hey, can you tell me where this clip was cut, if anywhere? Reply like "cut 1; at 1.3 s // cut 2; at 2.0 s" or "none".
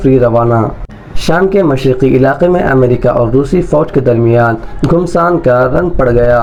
none